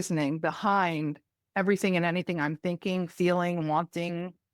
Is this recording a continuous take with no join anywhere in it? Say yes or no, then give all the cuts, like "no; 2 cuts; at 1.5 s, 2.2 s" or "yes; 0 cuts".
yes; 0 cuts